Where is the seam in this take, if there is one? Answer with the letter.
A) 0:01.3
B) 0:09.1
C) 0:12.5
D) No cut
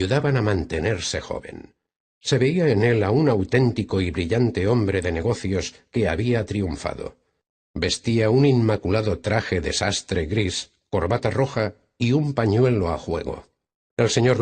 B